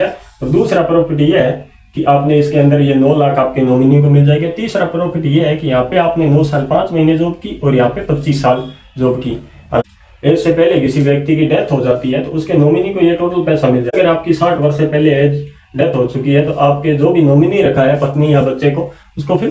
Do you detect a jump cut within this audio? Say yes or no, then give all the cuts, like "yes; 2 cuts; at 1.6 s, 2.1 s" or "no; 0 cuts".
yes; 2 cuts; at 9.8 s, 13.9 s